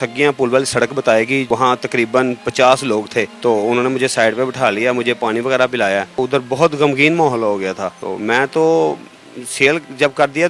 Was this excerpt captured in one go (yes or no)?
yes